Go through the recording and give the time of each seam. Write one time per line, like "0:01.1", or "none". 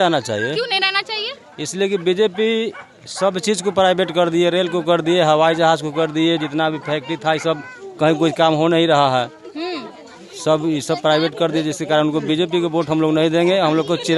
none